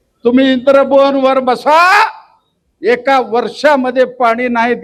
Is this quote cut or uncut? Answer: uncut